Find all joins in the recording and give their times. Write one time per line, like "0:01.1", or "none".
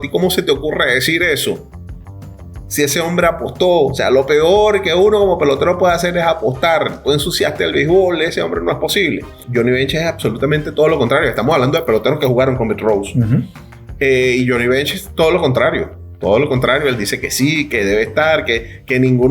0:09.4